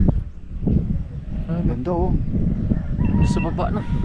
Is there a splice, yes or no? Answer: no